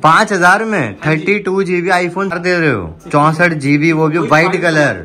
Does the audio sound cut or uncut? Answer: cut